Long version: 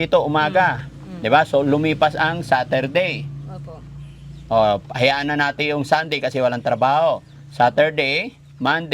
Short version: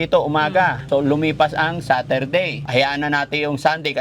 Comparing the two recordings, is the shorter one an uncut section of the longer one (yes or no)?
no